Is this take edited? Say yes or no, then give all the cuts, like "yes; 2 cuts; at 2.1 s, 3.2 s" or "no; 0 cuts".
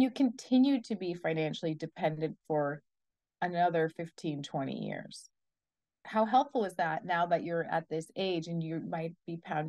no; 0 cuts